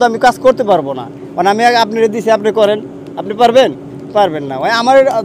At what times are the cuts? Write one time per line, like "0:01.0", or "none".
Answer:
none